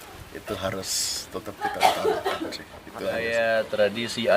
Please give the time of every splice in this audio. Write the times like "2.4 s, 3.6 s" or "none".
3.1 s